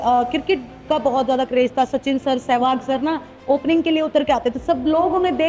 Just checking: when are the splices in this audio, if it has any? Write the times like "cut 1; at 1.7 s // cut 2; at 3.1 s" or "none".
none